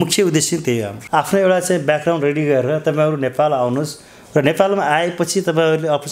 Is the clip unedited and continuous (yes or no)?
no